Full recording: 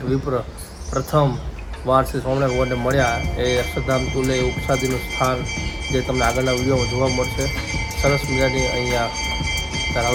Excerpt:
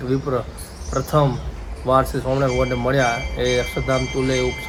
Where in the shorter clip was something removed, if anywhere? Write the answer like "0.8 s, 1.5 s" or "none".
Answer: none